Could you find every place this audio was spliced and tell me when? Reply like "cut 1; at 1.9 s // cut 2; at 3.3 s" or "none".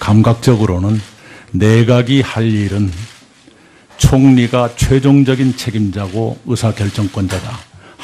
cut 1; at 4.0 s